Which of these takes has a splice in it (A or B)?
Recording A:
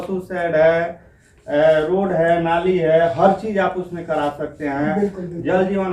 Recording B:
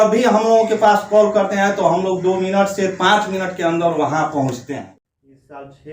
B